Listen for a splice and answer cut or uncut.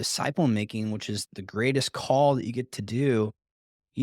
cut